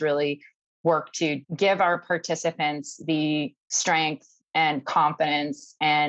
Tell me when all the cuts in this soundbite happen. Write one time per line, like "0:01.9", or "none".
0:01.4